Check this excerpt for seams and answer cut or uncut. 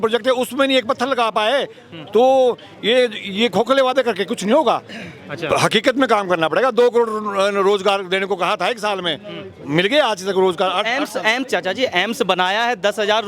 uncut